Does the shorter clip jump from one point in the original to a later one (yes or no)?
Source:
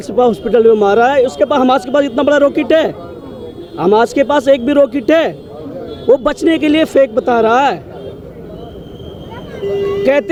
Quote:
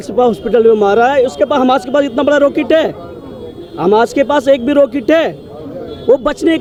no